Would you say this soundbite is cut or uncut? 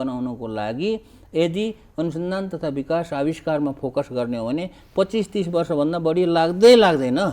uncut